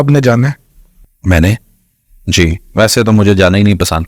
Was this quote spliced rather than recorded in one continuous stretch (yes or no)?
no